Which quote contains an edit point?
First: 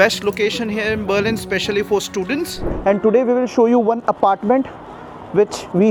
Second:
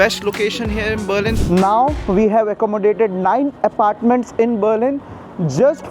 second; 1 cut; at 1.4 s

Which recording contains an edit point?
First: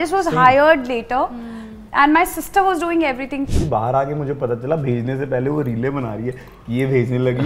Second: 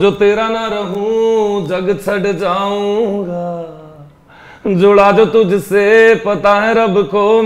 first; 1 cut; at 3.5 s

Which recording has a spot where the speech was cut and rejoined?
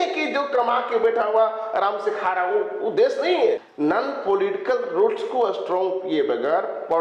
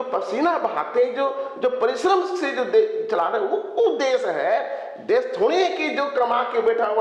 first; 1 cut; at 3.6 s

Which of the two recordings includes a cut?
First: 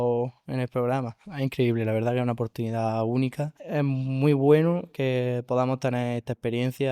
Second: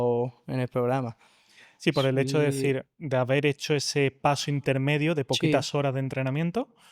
first; 2 cuts; at 1.2 s, 3.6 s

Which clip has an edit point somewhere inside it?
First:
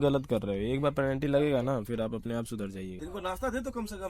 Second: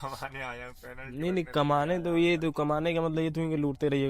first; 1 cut; at 3.0 s

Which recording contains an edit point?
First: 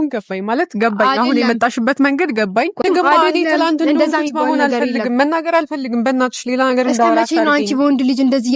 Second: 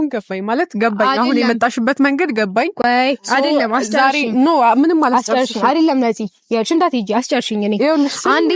first; 1 cut; at 2.8 s

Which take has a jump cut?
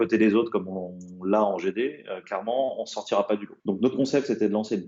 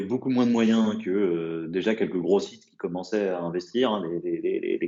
first; 1 cut; at 3.5 s

